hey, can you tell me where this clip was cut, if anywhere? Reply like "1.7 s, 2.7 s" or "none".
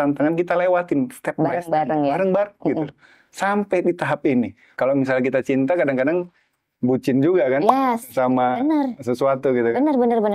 4.6 s